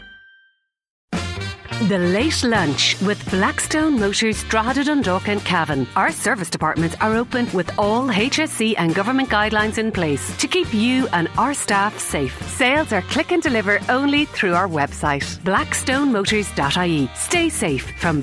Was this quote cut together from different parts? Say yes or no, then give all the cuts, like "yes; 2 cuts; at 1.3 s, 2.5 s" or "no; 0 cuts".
yes; 1 cut; at 1.0 s